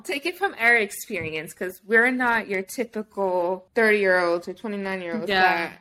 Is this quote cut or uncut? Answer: cut